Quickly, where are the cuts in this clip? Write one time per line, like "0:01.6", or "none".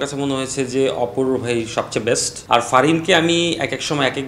0:02.3

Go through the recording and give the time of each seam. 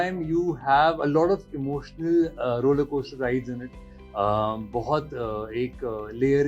none

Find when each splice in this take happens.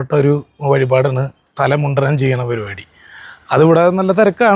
none

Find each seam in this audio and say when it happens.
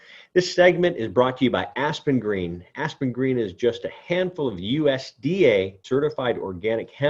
0:05.8

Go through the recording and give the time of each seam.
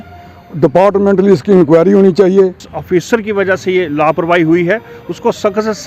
0:02.7

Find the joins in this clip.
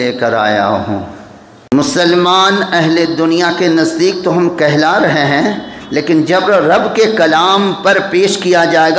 0:01.7

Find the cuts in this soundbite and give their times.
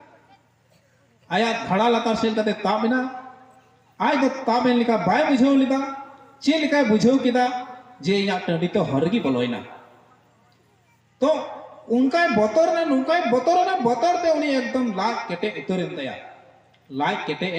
none

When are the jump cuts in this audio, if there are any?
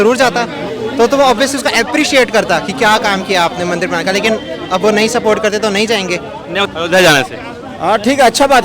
0:06.7

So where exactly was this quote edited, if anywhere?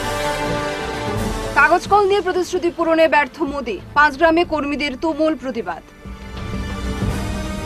0:01.2

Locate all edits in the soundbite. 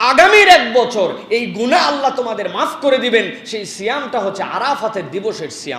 none

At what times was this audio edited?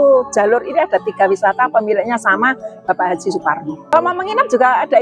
0:03.9

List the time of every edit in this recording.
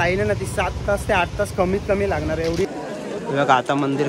0:02.7

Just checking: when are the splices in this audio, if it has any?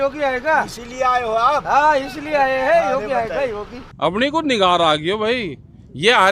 0:03.8

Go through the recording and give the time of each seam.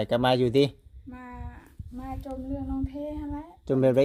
none

